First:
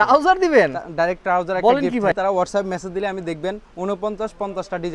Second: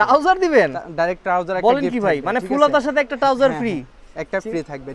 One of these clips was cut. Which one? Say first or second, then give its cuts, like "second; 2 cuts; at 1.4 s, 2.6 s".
first; 1 cut; at 2.1 s